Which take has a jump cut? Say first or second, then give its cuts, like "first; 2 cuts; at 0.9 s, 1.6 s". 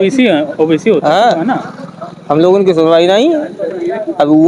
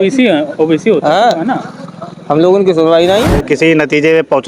second; 1 cut; at 3.4 s